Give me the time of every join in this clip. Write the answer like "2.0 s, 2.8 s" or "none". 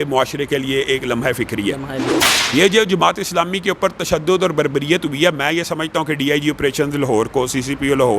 2.1 s